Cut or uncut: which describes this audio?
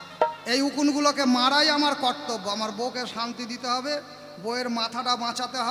uncut